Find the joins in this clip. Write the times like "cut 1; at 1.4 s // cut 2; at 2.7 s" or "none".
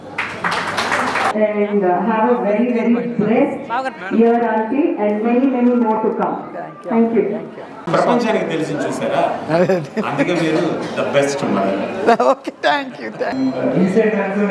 cut 1; at 1.3 s // cut 2; at 13.3 s